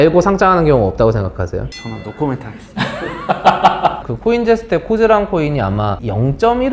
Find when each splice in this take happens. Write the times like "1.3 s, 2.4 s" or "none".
1.8 s, 4.1 s